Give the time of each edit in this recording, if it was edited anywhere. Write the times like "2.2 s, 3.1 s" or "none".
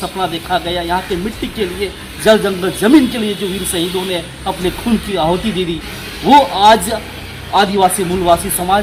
none